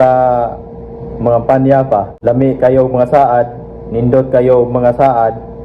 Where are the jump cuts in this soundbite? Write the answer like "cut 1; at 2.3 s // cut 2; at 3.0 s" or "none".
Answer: cut 1; at 2.1 s